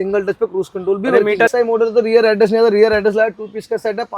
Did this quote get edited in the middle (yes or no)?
yes